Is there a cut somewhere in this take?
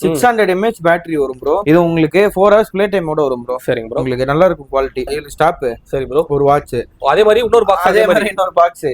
yes; 2 cuts; at 1.6 s, 5.1 s

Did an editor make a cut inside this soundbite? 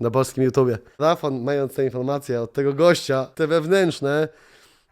yes; 2 cuts; at 1.0 s, 3.3 s

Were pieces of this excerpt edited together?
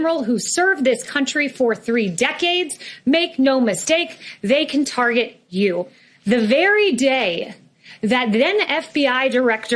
yes; 1 cut; at 6.0 s

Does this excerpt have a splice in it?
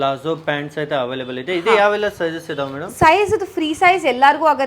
no; 0 cuts

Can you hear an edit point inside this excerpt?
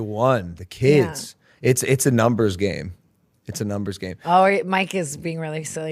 no; 0 cuts

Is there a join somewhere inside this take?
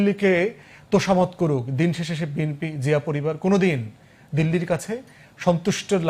no; 0 cuts

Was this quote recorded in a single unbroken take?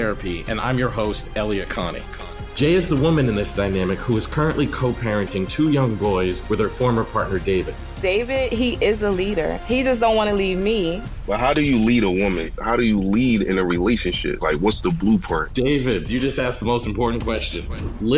yes; 0 cuts

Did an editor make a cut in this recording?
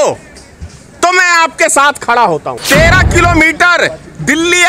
yes; 1 cut; at 2.5 s

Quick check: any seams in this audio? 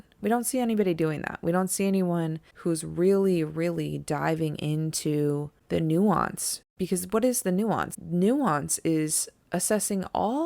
yes; 4 cuts; at 2.4 s, 5.5 s, 6.7 s, 7.9 s

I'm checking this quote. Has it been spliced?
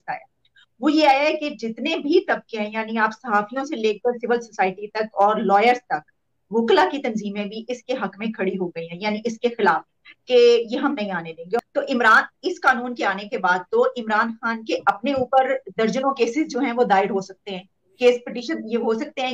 yes; 1 cut; at 11.6 s

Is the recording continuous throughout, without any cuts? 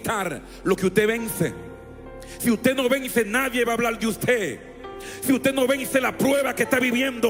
yes; 0 cuts

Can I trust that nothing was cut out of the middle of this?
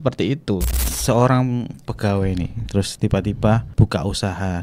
no; 2 cuts; at 0.9 s, 3.7 s

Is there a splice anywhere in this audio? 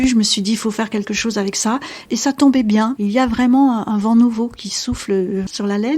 no; 0 cuts

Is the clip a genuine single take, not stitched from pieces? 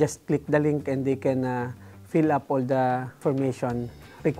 no; 1 cut; at 3.2 s

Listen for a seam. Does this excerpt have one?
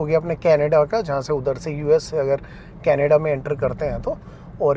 no; 0 cuts

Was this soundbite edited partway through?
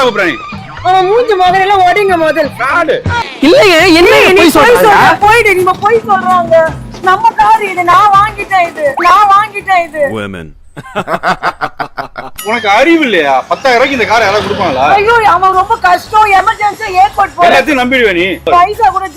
yes; 1 cut; at 3.1 s

